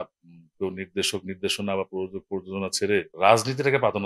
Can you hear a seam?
yes; 1 cut; at 3.1 s

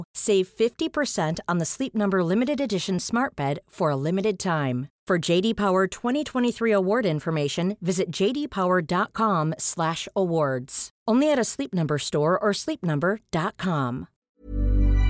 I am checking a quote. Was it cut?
yes; 1 cut; at 14.1 s

